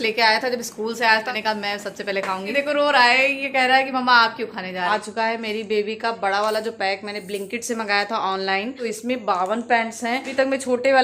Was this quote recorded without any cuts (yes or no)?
no